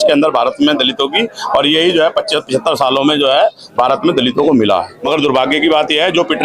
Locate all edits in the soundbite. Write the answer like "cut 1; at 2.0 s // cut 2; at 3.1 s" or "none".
cut 1; at 5.0 s

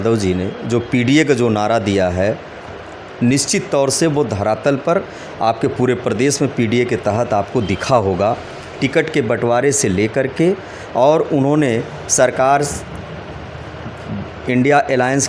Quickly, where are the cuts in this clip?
none

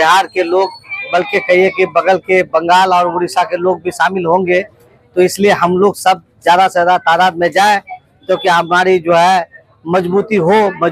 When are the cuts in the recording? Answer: none

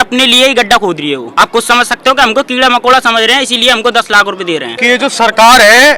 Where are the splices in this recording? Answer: cut 1; at 1.3 s // cut 2; at 4.7 s

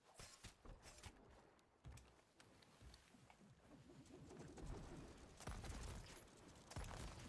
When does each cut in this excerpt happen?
none

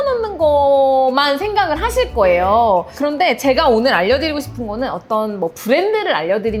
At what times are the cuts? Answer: none

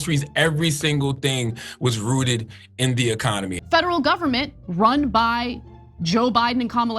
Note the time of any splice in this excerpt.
cut 1; at 3.5 s

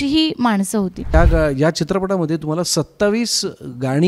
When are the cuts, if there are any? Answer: cut 1; at 1.1 s

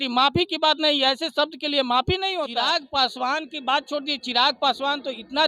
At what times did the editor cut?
cut 1; at 2.5 s

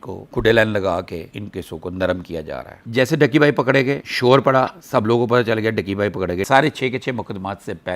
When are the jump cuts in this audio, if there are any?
cut 1; at 2.8 s // cut 2; at 6.5 s

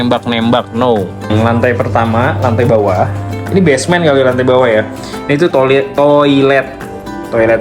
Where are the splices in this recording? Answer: cut 1; at 1.3 s

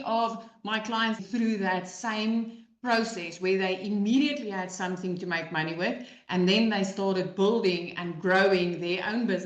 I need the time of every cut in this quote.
cut 1; at 1.2 s

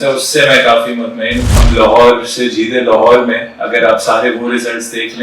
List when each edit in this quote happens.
cut 1; at 1.5 s

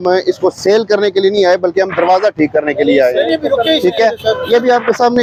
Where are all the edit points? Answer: none

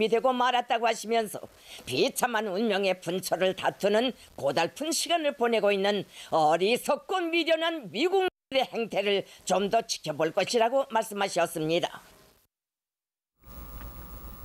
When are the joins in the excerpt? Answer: cut 1; at 1.0 s

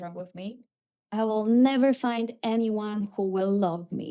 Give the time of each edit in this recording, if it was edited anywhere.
cut 1; at 1.0 s

